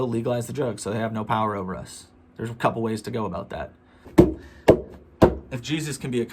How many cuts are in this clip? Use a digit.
1